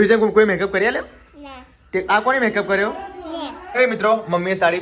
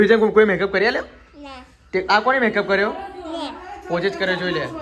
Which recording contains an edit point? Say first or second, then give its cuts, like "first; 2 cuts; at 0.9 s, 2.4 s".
first; 1 cut; at 3.6 s